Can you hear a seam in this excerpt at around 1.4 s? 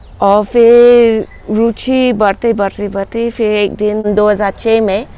no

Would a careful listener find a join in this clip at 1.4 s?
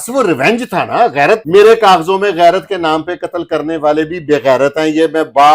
yes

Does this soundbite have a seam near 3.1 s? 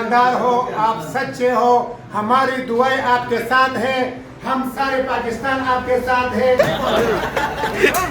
no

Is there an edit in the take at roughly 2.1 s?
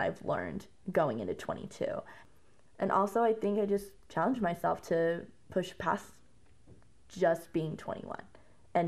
yes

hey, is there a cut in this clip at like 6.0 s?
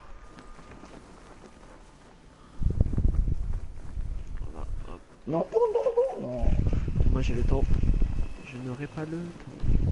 yes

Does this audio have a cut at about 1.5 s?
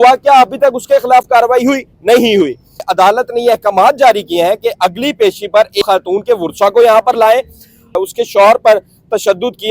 no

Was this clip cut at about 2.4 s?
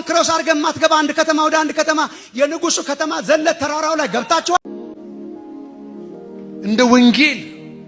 no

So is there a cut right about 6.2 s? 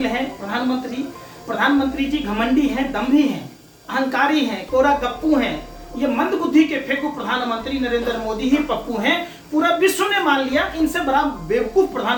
no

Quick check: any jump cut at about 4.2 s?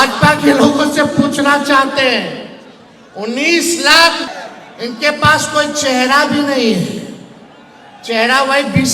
yes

